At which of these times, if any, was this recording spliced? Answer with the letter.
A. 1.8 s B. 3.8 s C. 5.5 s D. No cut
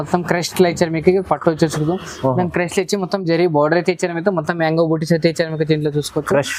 D